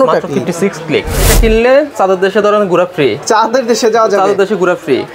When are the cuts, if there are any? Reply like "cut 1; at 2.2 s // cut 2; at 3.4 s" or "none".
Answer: cut 1; at 1.2 s